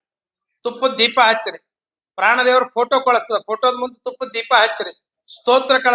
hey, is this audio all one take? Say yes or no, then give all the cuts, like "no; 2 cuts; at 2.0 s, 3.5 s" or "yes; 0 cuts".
yes; 0 cuts